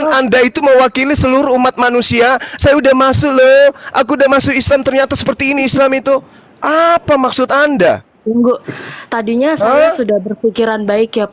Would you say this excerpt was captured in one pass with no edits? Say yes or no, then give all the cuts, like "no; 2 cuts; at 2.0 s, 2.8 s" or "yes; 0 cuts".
yes; 0 cuts